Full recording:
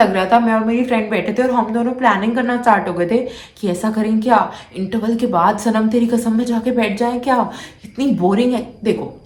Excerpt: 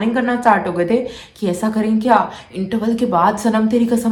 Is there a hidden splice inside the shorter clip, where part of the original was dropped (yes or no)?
no